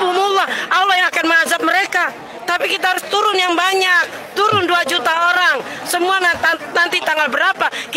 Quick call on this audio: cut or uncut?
uncut